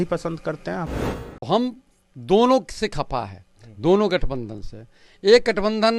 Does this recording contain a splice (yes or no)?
yes